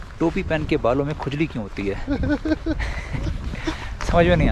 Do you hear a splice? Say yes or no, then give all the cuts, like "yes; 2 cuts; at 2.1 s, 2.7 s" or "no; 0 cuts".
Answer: no; 0 cuts